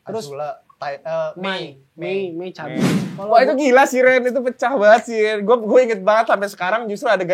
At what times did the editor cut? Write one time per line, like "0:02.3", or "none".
0:02.9